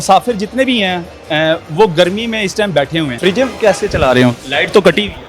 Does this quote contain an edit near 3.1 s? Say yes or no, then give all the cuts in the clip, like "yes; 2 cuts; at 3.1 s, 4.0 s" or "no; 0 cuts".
yes; 1 cut; at 3.1 s